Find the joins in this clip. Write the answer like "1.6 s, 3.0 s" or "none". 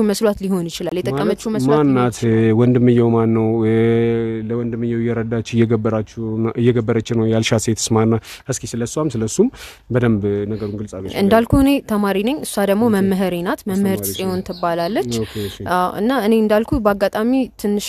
none